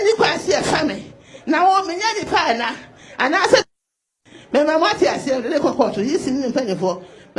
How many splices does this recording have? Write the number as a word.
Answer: zero